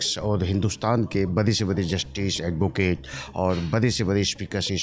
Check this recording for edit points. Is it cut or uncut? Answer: uncut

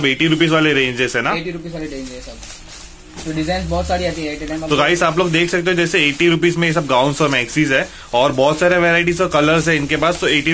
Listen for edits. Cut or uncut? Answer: uncut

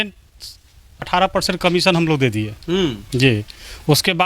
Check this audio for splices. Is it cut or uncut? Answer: cut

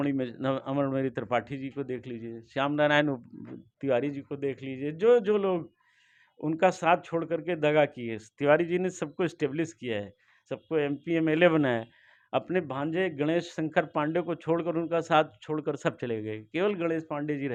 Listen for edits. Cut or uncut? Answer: uncut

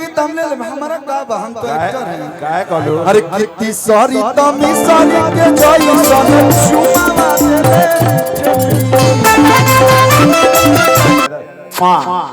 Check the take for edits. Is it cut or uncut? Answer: cut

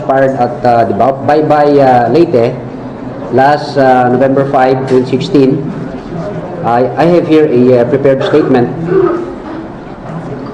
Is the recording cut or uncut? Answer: uncut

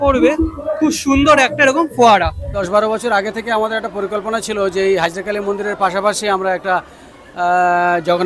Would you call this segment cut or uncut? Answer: cut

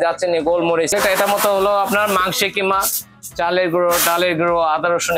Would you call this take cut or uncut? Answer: cut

